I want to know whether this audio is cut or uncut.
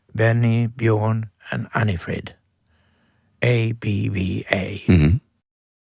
uncut